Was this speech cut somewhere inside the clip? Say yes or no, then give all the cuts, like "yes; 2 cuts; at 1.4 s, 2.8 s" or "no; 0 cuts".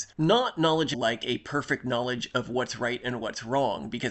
yes; 1 cut; at 1.0 s